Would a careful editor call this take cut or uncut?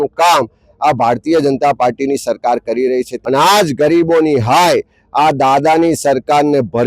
cut